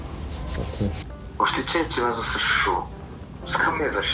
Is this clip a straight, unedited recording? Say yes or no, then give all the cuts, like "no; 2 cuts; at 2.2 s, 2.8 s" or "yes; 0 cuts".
no; 1 cut; at 1.1 s